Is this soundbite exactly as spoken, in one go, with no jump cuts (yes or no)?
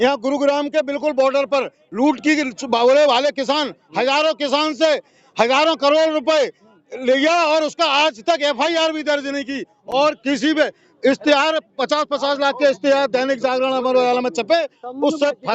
yes